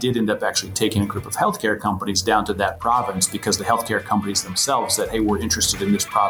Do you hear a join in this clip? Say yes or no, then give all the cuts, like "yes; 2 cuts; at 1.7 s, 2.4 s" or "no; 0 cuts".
no; 0 cuts